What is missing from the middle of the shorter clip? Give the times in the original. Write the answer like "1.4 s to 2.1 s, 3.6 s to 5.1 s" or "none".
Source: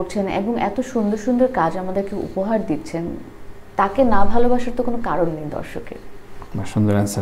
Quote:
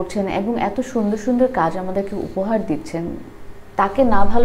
none